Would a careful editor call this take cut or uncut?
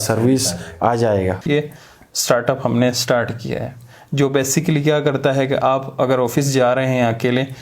cut